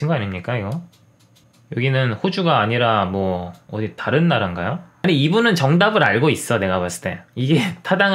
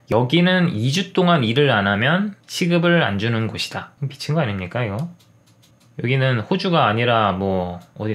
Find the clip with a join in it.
first; 1 cut; at 4.9 s

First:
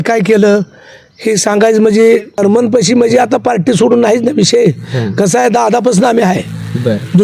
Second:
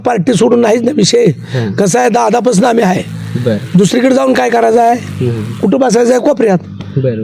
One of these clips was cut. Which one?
first; 1 cut; at 2.4 s

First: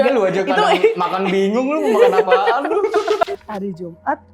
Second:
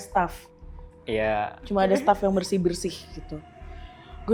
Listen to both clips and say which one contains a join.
first; 1 cut; at 3.2 s

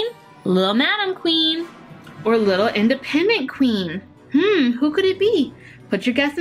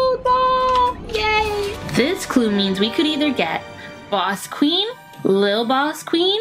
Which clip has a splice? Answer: second; 1 cut; at 1.8 s

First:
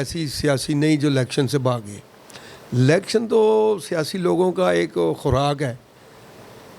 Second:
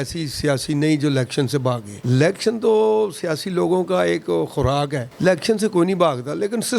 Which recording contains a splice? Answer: second; 2 cuts; at 1.9 s, 5.0 s

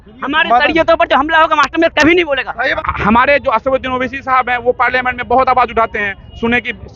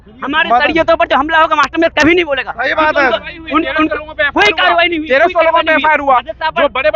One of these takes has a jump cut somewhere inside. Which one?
first; 1 cut; at 2.7 s

